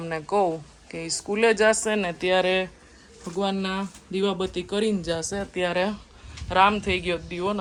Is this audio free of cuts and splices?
yes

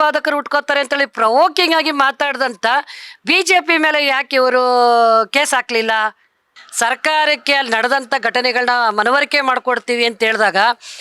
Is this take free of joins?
no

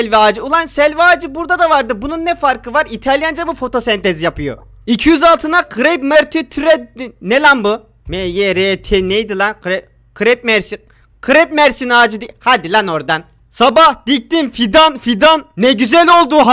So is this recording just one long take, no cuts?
yes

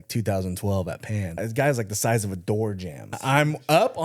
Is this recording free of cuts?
no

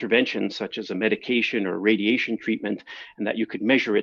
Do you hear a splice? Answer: no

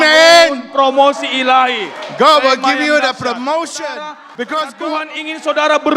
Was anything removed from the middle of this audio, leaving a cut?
yes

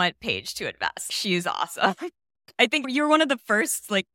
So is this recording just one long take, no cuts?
no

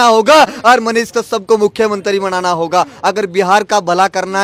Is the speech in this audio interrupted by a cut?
no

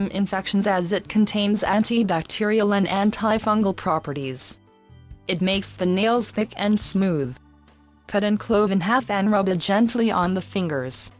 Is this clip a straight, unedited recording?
no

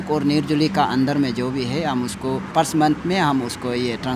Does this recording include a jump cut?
yes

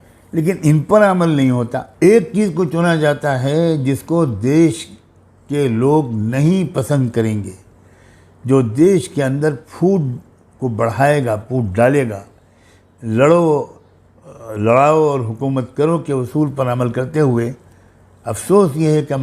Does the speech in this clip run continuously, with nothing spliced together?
no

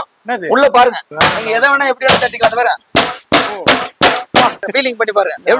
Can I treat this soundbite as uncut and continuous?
no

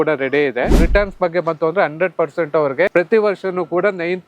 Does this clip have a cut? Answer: yes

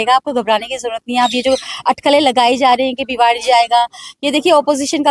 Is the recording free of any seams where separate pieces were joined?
yes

